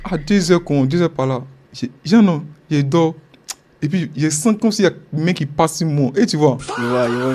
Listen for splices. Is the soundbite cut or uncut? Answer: uncut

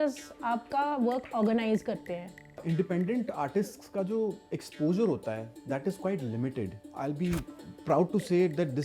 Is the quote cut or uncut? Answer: cut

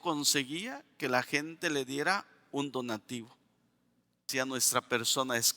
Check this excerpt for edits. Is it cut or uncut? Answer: cut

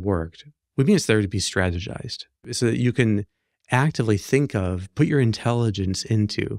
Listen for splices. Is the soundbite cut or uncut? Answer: cut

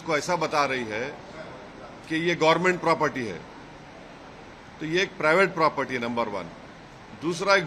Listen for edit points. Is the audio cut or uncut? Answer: uncut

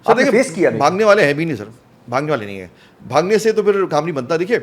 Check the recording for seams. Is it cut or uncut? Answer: uncut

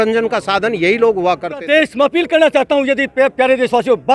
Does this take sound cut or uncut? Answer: cut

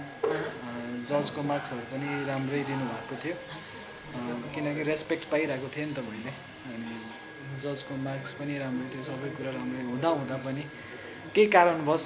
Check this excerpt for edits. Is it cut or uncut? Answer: uncut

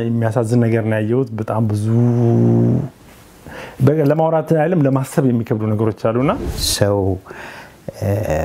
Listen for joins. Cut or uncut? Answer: cut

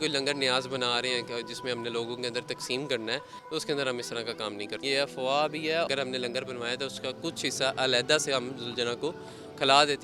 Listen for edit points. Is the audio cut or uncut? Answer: cut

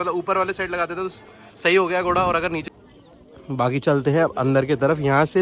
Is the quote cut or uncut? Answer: cut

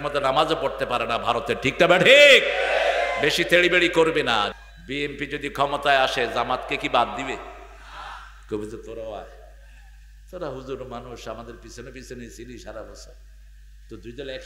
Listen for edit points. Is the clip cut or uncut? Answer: cut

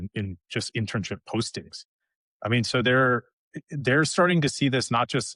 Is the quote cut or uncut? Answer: uncut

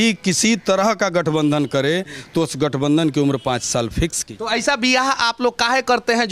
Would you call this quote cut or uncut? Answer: cut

